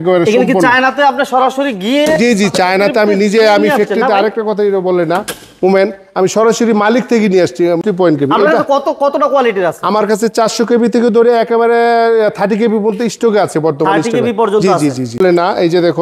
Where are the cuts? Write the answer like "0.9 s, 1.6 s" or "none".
7.8 s, 15.2 s